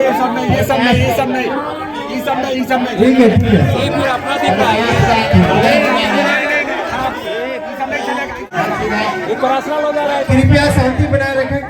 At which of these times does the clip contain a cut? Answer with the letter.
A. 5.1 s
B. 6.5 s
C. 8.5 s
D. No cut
C